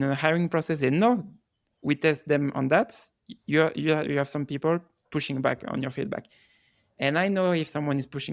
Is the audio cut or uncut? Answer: uncut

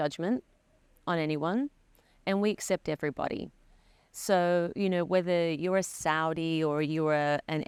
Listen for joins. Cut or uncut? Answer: uncut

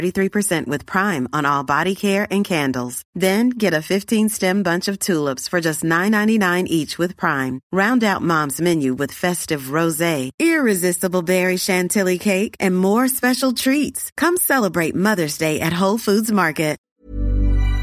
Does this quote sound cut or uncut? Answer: cut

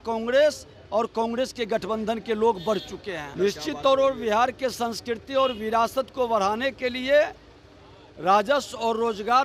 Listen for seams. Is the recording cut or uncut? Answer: cut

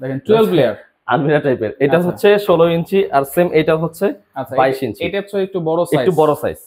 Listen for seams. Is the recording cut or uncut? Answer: uncut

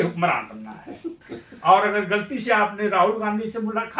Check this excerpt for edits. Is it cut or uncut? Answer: cut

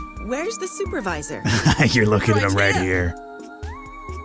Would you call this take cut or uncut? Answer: uncut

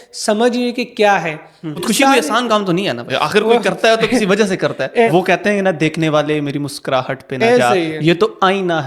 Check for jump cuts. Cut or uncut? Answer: cut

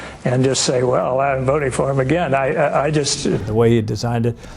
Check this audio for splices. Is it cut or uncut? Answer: cut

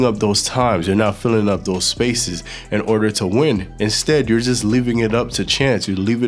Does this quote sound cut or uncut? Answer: uncut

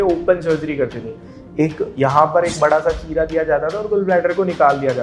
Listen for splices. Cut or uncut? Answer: uncut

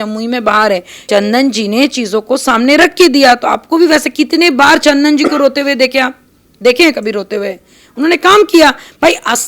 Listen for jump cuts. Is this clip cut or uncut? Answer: cut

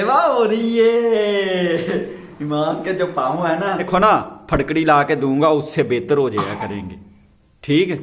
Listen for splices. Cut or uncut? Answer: cut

